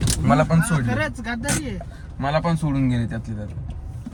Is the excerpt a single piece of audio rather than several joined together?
yes; 0 cuts

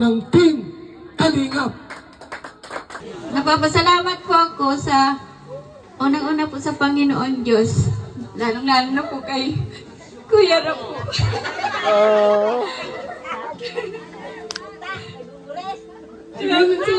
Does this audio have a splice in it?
yes; 1 cut; at 3.0 s

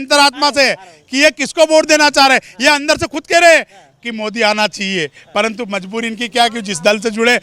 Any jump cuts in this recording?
no; 0 cuts

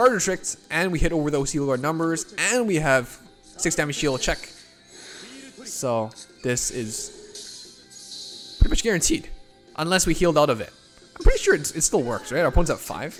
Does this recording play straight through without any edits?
yes; 0 cuts

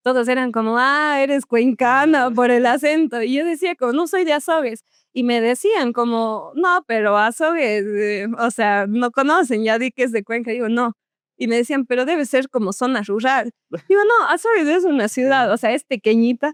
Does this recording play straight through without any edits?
yes; 0 cuts

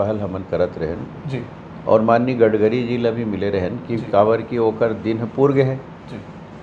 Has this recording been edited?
no; 0 cuts

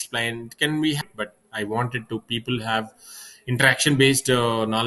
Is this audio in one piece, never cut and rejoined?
no; 1 cut; at 1.0 s

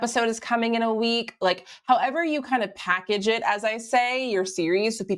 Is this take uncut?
yes; 0 cuts

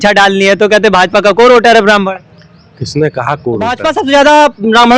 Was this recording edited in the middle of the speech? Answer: yes; 1 cut; at 3.8 s

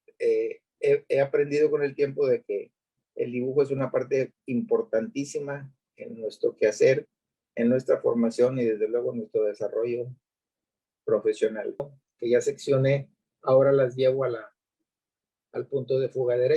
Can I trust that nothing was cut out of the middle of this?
no; 1 cut; at 11.8 s

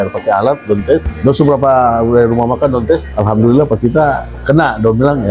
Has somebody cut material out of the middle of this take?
yes; 2 cuts; at 1.1 s, 3.1 s

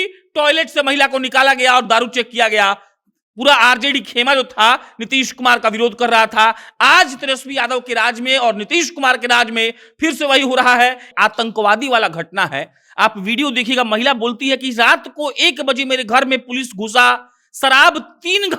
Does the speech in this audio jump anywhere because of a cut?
yes; 1 cut; at 11.1 s

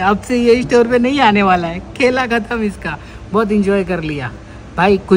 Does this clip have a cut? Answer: no; 0 cuts

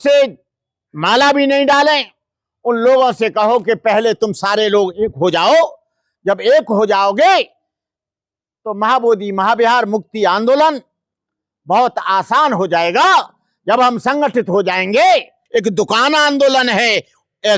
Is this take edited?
yes; 1 cut; at 15.4 s

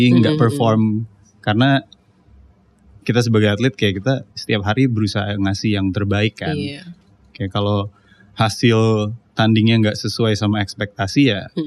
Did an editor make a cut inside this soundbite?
no; 0 cuts

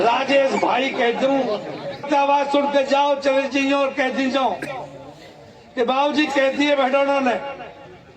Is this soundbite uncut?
no; 1 cut; at 2.1 s

